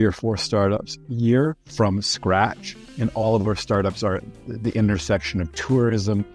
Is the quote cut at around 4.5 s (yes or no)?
no